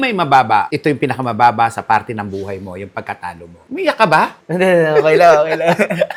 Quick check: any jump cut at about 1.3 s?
no; 0 cuts

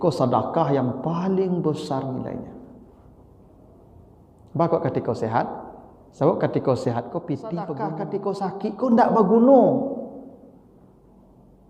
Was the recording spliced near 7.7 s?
yes; 1 cut; at 7.7 s

